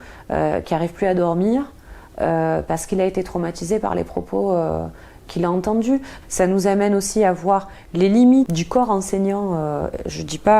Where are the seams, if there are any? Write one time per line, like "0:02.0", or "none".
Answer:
0:06.1
0:08.5